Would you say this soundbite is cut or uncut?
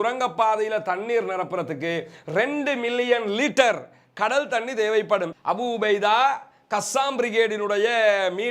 cut